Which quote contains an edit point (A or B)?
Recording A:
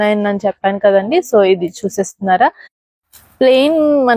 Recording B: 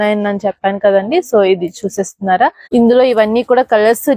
B